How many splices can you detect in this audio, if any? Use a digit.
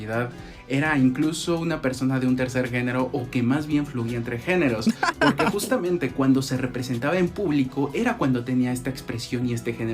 1